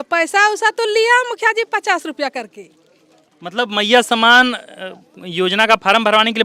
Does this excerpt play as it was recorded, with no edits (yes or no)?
yes